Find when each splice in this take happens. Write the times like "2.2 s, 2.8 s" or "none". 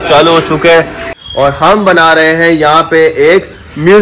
1.1 s